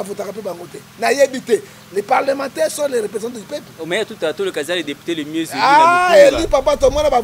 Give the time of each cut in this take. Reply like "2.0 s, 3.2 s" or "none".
none